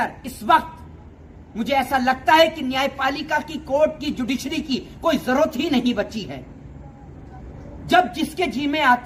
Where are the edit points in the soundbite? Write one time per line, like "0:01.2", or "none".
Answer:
none